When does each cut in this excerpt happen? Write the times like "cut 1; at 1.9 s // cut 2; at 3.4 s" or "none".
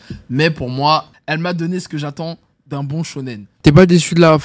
cut 1; at 1.2 s // cut 2; at 3.4 s